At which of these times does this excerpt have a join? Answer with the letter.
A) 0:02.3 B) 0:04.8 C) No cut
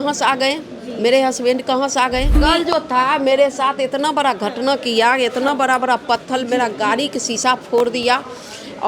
A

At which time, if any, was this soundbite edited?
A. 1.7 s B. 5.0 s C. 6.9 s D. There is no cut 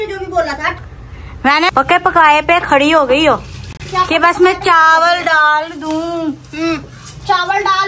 A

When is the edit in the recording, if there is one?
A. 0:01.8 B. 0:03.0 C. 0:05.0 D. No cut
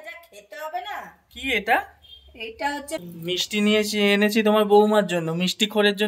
B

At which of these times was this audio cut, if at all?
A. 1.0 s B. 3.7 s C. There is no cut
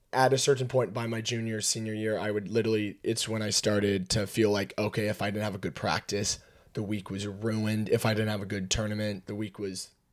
C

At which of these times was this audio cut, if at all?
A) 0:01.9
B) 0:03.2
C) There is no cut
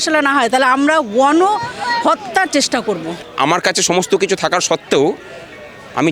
B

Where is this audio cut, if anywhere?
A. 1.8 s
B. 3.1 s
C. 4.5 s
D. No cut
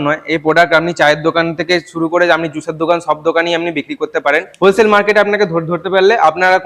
C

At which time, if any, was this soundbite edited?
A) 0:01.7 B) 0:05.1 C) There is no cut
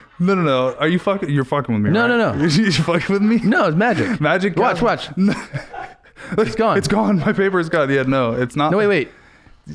C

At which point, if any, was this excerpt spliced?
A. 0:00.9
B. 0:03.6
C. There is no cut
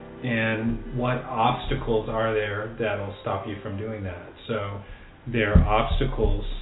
C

